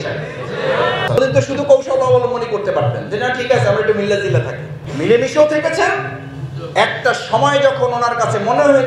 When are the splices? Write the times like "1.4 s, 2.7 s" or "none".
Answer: 1.2 s